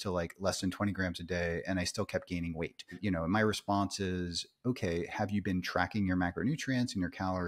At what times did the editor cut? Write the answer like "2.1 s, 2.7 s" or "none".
3.0 s, 5.1 s